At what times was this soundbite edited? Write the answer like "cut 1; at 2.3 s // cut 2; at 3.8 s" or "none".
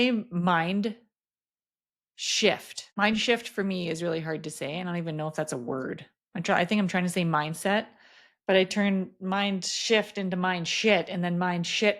cut 1; at 2.8 s